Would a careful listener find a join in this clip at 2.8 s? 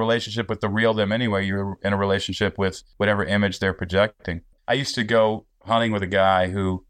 yes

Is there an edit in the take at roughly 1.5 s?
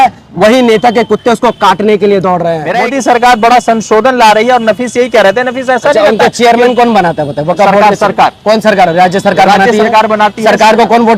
no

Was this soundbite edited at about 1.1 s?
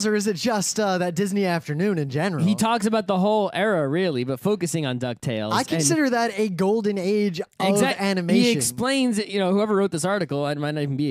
no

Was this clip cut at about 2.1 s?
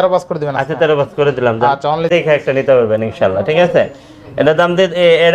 yes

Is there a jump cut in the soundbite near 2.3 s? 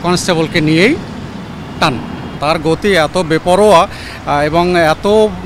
yes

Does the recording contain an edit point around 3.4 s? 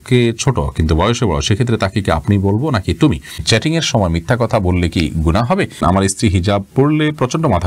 yes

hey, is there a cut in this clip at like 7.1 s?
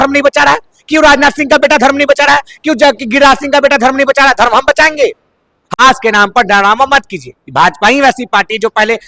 no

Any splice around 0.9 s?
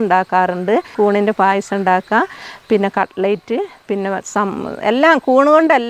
yes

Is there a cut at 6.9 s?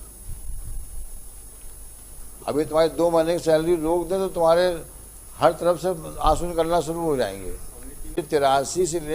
no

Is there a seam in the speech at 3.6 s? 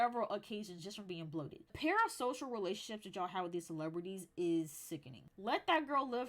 no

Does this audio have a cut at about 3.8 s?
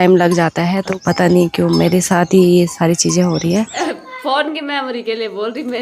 yes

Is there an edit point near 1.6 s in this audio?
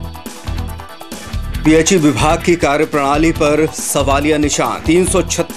yes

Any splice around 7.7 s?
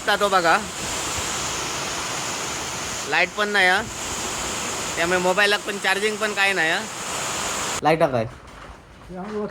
yes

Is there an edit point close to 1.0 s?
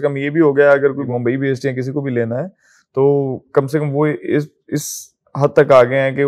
yes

